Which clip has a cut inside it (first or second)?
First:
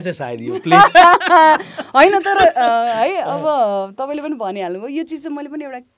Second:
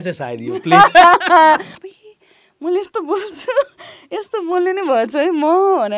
second